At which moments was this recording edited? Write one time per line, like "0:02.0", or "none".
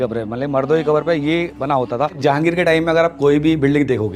0:02.2

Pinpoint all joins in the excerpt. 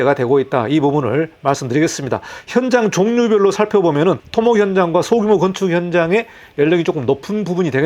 none

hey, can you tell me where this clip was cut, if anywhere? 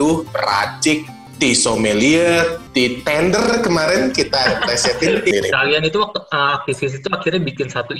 0:01.2
0:02.6
0:05.3

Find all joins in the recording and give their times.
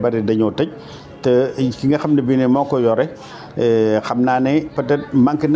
none

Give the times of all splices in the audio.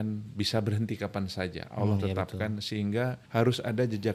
0:03.2

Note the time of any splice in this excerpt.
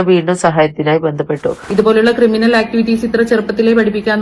0:01.6

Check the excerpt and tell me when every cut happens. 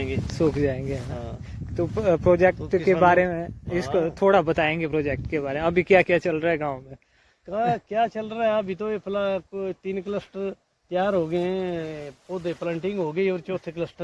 none

